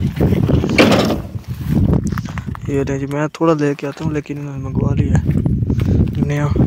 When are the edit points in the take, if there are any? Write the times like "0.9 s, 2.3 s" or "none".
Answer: none